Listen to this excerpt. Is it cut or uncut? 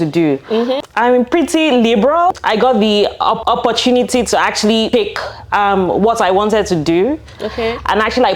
cut